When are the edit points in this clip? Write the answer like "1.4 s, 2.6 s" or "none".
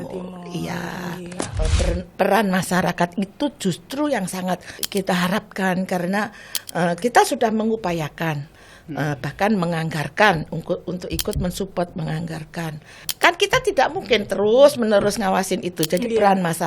1.6 s, 4.8 s, 13.1 s

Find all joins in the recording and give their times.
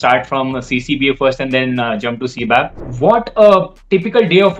2.8 s

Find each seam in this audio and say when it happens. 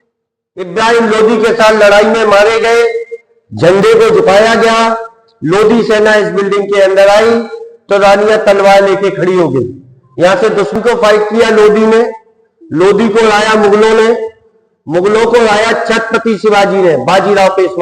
10.7 s

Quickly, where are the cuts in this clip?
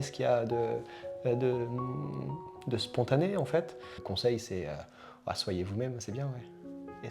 4.0 s

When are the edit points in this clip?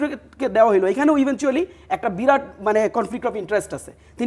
none

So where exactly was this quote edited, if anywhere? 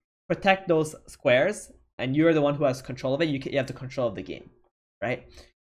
1.9 s

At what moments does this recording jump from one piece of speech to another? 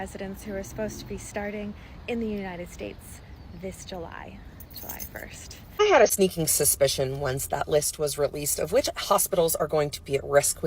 5.7 s

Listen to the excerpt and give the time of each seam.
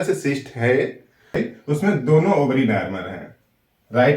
1.6 s

